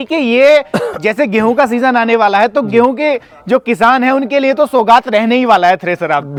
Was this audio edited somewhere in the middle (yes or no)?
no